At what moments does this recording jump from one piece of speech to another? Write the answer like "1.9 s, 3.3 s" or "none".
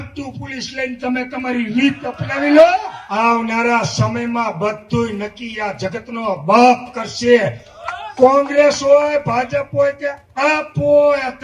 3.0 s